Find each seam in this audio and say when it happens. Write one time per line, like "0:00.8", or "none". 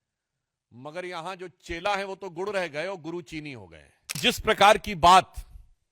0:04.2